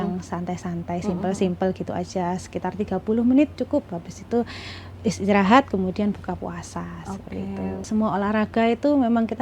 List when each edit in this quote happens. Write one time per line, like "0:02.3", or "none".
0:07.9